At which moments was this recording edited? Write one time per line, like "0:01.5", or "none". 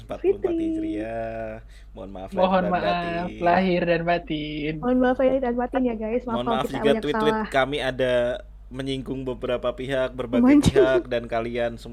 none